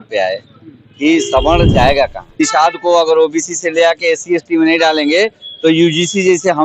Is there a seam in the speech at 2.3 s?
yes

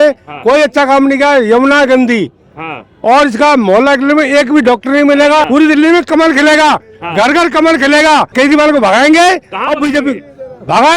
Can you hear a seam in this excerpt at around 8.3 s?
yes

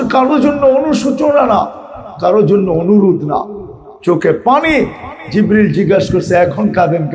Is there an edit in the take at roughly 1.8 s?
no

